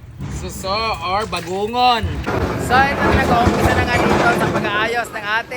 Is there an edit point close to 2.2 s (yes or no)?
yes